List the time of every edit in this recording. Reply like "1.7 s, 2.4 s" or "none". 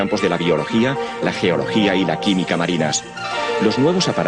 2.3 s